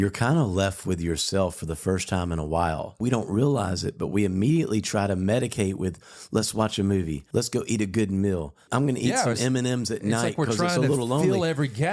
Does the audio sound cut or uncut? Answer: cut